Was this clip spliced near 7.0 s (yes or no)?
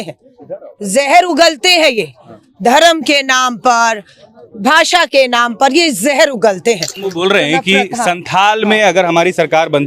yes